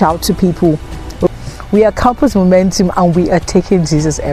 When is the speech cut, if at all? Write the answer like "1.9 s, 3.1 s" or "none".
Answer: 1.3 s